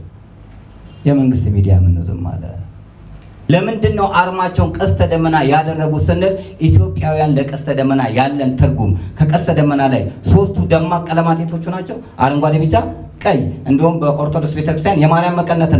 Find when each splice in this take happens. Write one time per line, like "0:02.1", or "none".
0:03.5